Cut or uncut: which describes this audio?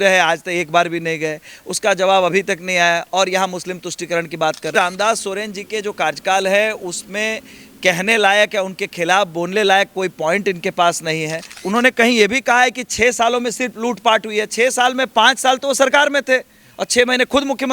cut